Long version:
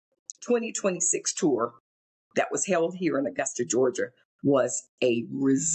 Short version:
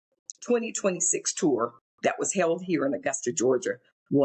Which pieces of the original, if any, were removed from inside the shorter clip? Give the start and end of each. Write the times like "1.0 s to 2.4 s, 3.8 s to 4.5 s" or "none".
1.8 s to 2.2 s